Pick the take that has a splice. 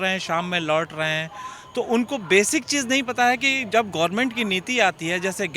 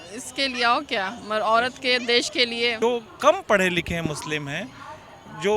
second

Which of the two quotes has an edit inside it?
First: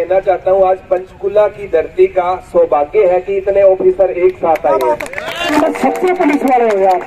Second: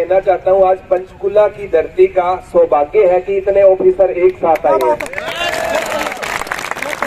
first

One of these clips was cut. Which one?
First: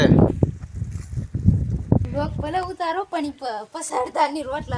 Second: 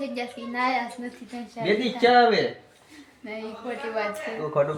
first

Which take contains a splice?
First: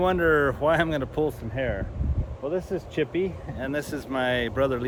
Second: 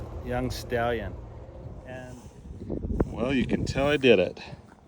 second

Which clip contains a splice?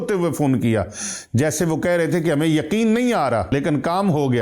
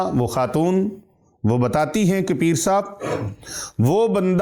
first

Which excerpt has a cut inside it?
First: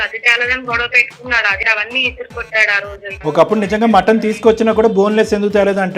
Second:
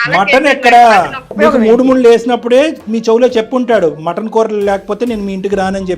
first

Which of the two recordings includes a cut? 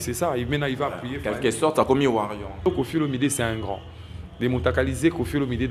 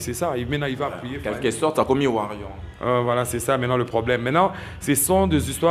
first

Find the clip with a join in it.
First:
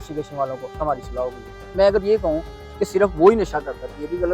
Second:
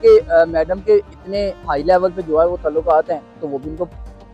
first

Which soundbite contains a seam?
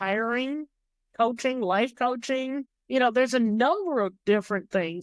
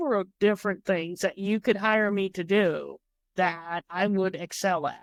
first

